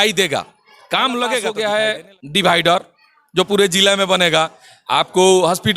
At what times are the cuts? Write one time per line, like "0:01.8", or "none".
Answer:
0:01.5